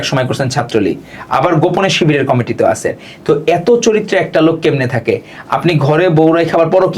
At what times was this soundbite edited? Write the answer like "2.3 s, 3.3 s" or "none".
none